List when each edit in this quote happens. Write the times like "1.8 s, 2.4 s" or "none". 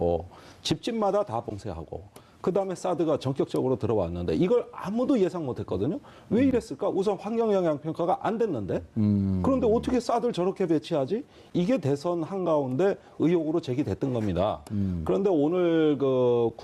none